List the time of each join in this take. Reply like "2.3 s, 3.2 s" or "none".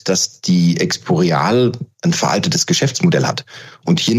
none